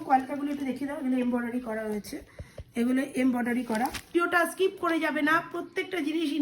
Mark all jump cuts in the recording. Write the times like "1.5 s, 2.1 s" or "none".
4.1 s